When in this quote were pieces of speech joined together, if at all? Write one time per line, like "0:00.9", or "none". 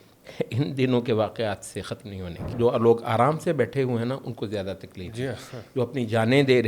0:02.5